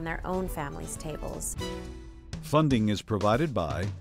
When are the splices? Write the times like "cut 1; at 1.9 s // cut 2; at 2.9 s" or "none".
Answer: cut 1; at 1.9 s